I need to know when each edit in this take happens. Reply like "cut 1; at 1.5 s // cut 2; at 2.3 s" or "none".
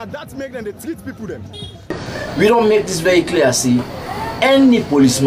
cut 1; at 2.0 s